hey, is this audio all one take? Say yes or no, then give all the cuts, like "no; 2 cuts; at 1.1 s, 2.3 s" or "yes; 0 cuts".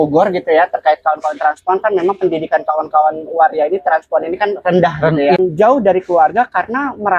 no; 1 cut; at 5.4 s